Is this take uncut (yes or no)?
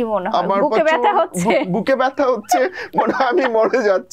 yes